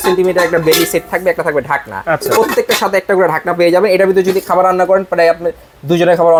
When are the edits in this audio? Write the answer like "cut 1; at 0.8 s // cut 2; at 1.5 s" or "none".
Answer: none